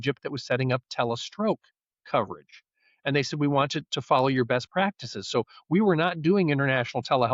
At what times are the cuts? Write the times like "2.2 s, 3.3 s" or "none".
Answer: none